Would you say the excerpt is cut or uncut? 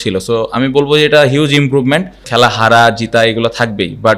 cut